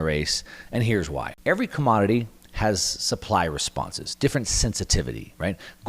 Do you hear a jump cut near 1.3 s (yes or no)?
yes